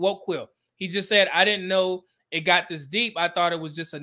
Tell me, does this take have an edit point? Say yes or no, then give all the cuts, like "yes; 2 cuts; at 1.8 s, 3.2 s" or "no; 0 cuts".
no; 0 cuts